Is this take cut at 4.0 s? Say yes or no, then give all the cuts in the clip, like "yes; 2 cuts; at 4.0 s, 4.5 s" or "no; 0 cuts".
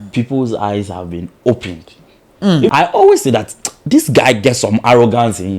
no; 1 cut; at 2.7 s